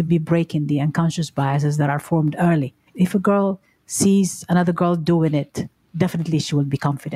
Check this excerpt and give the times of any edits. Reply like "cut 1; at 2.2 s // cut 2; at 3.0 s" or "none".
cut 1; at 2.9 s